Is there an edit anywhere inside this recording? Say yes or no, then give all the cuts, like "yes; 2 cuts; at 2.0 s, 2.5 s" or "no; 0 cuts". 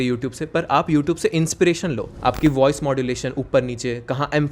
yes; 1 cut; at 2.1 s